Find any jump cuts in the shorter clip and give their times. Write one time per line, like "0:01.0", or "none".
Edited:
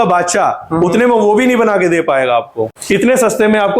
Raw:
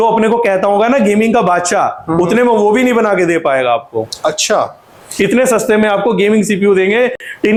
0:02.8